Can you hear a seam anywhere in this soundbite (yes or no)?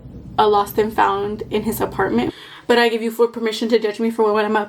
yes